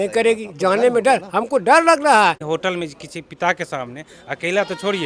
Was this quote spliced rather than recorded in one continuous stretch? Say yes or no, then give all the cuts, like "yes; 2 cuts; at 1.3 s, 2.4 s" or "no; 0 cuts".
yes; 1 cut; at 2.5 s